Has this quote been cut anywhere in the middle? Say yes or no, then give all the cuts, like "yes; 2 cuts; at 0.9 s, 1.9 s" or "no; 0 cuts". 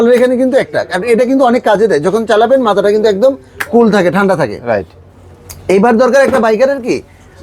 no; 0 cuts